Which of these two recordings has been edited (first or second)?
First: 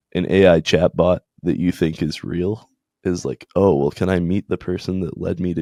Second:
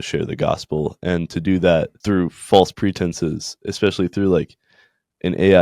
second